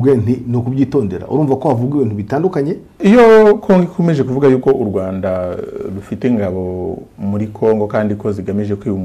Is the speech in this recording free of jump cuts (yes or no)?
no